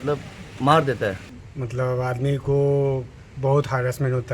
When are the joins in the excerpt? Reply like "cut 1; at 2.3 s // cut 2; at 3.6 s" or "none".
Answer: cut 1; at 1.3 s